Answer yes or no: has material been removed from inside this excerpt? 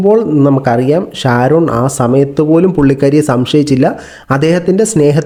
no